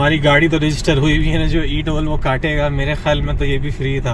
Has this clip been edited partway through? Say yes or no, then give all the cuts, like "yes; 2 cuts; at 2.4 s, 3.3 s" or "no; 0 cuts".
no; 0 cuts